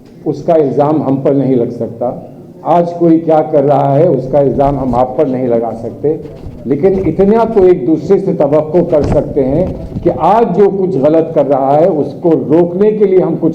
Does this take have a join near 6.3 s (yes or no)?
no